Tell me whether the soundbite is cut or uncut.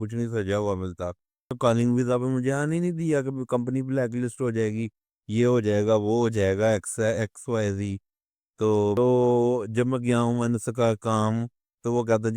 cut